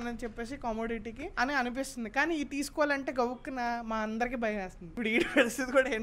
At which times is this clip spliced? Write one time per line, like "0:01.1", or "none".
none